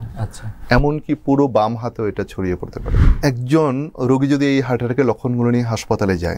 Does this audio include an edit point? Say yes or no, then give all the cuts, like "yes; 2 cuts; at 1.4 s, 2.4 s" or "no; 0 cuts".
yes; 1 cut; at 3.1 s